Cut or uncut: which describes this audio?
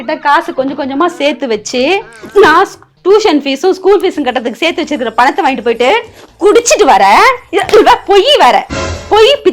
uncut